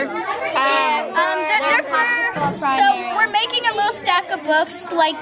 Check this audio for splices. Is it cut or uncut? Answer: uncut